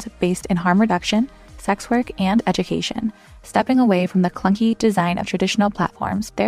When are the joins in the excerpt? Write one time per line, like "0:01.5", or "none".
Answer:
none